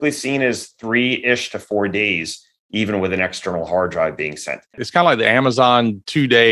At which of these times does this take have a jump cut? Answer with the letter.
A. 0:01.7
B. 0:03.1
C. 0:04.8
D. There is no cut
C